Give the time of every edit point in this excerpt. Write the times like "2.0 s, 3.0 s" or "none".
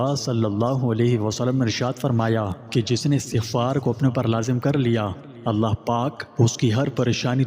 2.6 s, 6.2 s